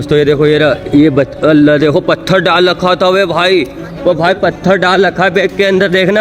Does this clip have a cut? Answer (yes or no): no